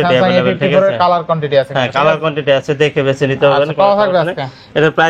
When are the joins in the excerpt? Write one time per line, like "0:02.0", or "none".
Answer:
none